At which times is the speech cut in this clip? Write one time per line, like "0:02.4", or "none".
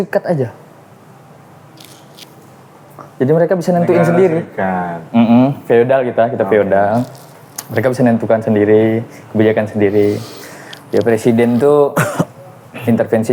none